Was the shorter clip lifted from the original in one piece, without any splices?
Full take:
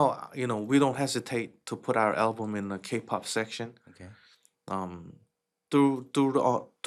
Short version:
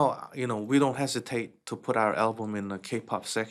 yes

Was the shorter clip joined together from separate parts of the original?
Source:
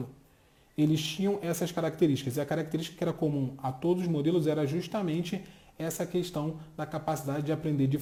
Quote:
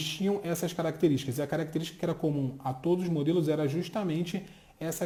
no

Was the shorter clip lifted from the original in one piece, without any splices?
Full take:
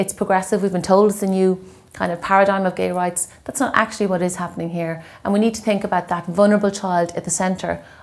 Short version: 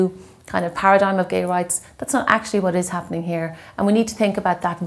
yes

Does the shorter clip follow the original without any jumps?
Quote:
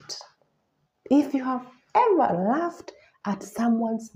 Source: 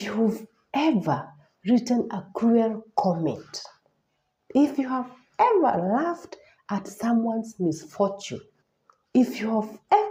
yes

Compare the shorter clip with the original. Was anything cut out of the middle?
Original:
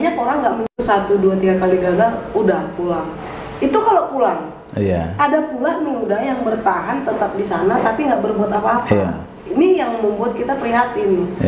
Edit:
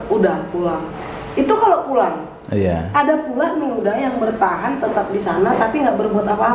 no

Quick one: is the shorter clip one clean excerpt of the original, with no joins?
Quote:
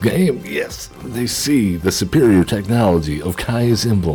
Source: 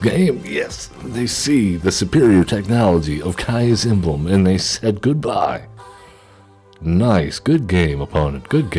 yes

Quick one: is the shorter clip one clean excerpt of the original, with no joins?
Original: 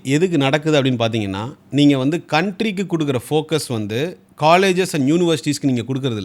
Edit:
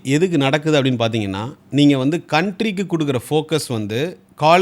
yes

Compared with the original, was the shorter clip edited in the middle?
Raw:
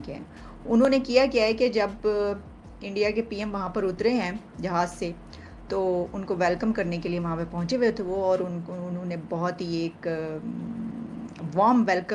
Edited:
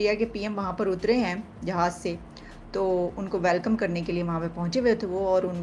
no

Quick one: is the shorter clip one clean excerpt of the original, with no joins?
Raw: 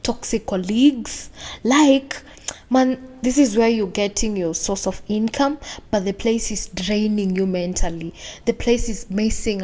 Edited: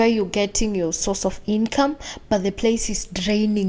yes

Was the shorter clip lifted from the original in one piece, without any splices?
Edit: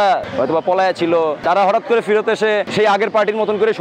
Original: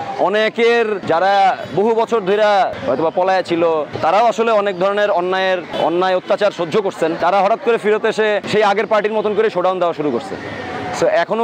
no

